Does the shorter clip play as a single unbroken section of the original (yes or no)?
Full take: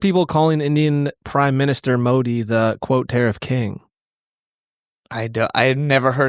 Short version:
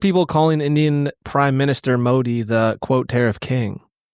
yes